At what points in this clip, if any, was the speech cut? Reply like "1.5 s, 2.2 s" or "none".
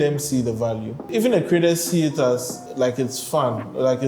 1.1 s, 2.6 s